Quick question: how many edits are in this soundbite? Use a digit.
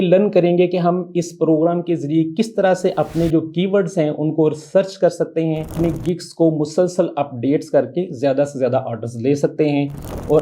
1